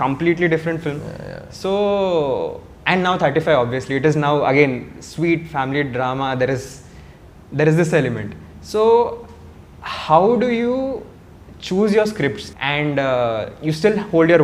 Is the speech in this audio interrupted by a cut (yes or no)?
yes